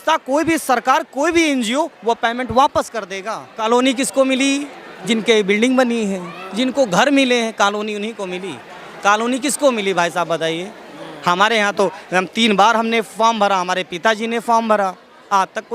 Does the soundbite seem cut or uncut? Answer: cut